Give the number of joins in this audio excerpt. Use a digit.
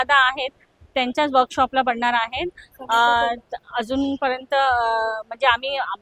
0